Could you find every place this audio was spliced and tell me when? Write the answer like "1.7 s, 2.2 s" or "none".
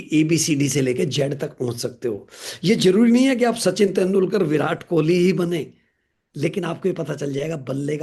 none